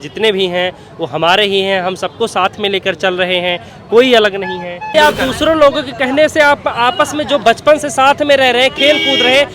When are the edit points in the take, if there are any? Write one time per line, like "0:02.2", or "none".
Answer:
0:04.9